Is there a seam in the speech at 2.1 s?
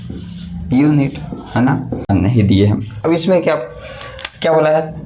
yes; 1 cut; at 2.1 s

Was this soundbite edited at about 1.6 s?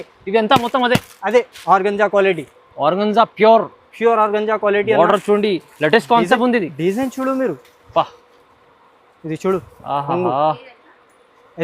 yes; 1 cut; at 1.6 s

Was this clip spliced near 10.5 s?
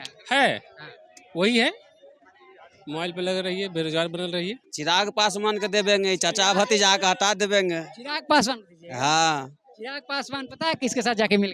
no; 1 cut; at 4.7 s

